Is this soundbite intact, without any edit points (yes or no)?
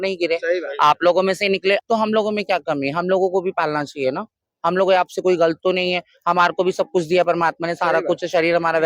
no